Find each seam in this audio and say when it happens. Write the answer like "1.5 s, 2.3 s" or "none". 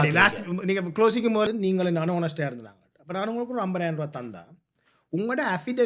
1.5 s